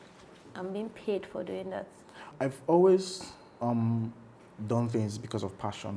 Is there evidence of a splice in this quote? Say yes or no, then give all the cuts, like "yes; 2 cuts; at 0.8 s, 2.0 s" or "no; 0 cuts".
yes; 1 cut; at 2.3 s